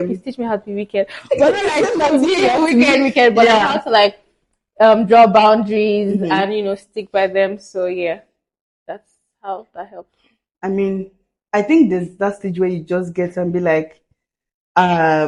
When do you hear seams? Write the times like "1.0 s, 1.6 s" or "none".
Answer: none